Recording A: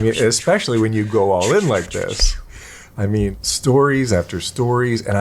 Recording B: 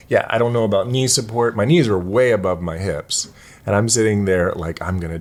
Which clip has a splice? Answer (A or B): A